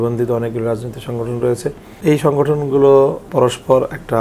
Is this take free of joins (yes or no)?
no